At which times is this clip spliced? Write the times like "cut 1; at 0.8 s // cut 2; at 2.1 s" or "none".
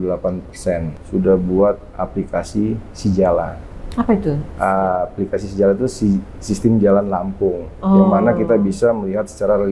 cut 1; at 0.9 s